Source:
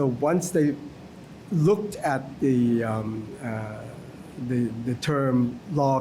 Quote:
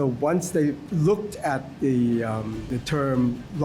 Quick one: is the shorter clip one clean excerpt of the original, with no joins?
no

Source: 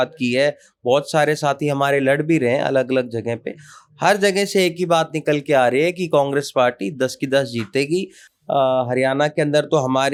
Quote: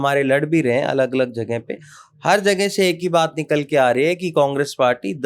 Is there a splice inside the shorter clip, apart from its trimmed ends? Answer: no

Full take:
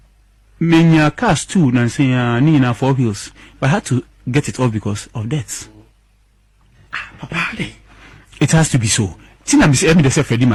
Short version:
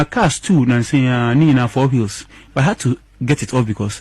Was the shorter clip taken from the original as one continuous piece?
yes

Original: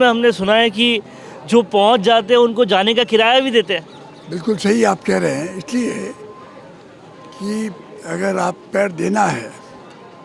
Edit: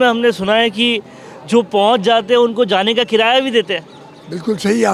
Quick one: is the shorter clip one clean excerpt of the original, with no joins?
yes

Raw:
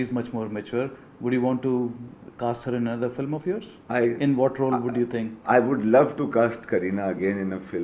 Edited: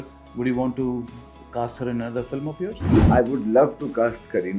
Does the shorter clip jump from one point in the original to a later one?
yes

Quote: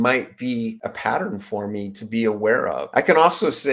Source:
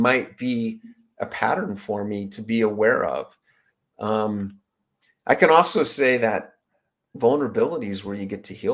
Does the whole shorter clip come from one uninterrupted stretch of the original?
no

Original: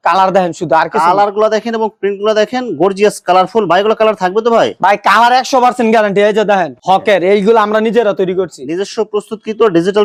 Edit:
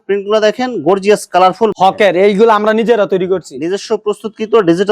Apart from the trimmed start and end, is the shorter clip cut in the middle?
yes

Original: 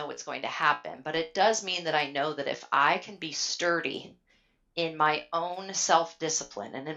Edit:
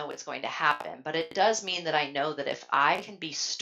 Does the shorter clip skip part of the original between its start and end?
no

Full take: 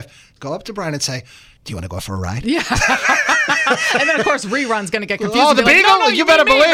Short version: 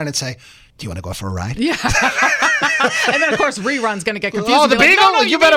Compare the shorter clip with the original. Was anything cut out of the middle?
no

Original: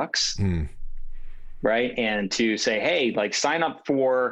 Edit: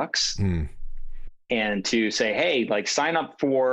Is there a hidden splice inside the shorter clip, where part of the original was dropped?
yes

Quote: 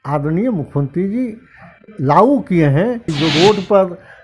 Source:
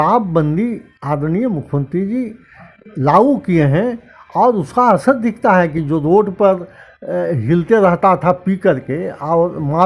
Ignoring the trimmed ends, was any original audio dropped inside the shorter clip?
yes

